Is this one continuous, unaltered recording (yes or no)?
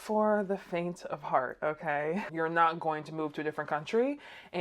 no